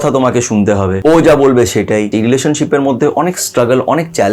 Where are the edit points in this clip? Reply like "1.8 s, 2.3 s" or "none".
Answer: 0.9 s, 2.1 s